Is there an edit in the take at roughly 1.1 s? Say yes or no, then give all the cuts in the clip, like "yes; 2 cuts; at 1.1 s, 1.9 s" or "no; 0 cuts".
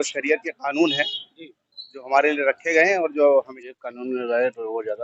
no; 1 cut; at 3.6 s